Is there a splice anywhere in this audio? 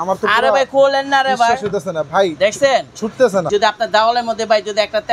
yes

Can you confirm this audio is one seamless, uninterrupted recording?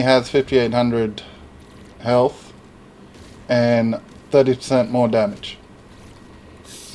yes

